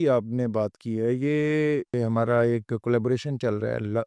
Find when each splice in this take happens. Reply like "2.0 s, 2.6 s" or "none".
1.9 s